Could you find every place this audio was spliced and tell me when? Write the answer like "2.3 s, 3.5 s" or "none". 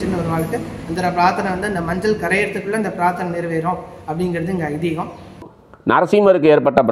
5.5 s